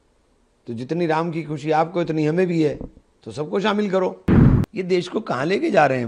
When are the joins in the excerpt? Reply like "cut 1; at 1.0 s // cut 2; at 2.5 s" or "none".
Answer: cut 1; at 4.2 s